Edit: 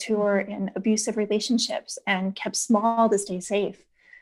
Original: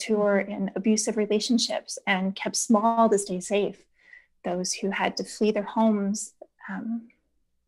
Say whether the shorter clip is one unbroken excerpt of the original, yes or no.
yes